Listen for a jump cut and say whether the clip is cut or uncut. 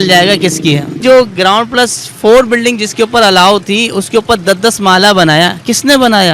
cut